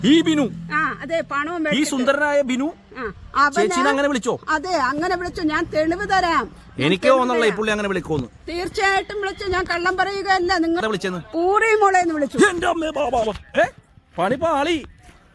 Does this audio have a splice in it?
no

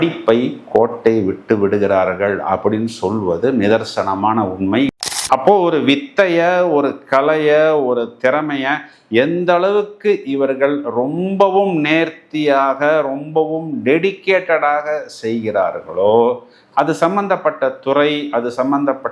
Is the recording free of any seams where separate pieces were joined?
no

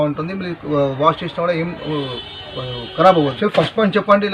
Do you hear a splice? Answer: yes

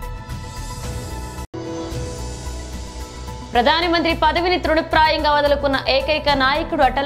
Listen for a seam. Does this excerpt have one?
no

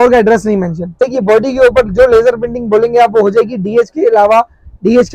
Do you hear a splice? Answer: yes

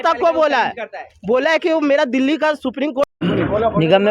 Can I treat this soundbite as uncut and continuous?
no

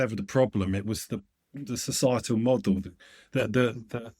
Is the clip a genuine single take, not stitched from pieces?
yes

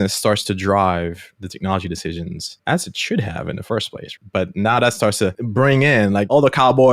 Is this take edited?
yes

